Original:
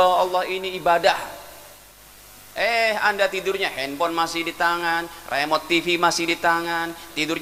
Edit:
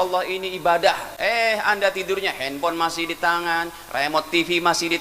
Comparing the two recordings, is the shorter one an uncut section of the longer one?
no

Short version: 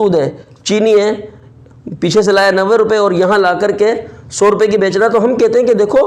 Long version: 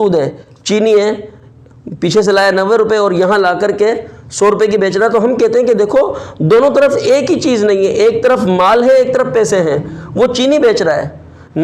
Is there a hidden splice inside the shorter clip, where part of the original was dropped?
no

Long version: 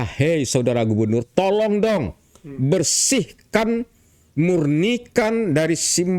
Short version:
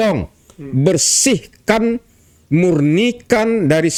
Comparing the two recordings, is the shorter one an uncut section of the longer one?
yes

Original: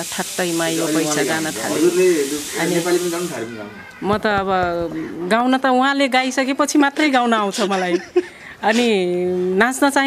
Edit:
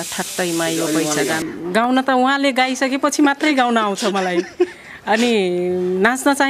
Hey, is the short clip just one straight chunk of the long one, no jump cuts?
no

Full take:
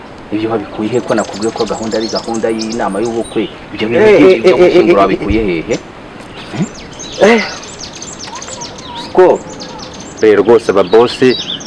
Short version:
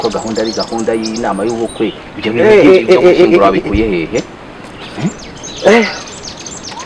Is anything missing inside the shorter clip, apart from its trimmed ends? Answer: no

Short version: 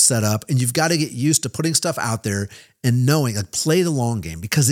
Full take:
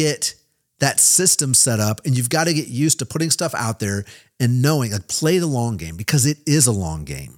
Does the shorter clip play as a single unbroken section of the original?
yes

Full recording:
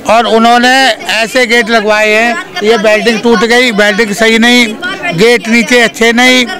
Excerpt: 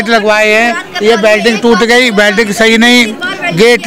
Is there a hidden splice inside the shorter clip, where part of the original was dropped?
no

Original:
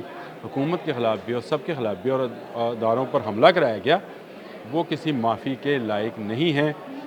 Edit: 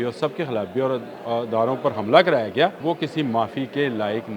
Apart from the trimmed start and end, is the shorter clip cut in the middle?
yes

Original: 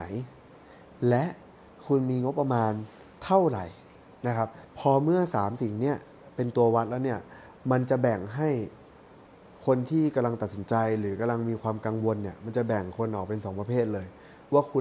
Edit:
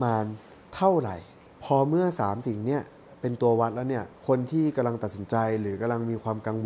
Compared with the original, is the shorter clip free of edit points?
no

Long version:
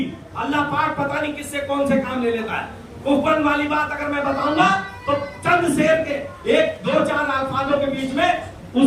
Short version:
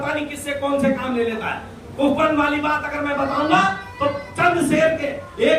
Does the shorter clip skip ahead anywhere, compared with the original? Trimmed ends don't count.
no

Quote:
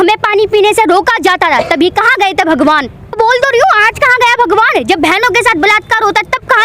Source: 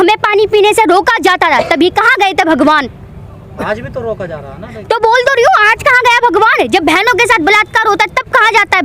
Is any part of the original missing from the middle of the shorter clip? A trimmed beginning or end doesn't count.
yes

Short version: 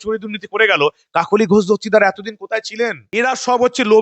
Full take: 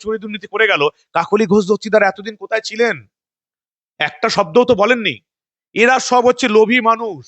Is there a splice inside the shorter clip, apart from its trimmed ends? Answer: yes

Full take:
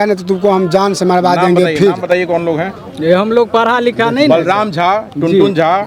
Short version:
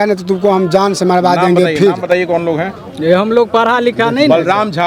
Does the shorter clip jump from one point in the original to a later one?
no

